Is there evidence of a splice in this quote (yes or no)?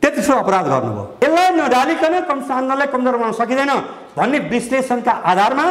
yes